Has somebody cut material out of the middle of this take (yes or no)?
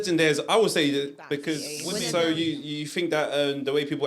yes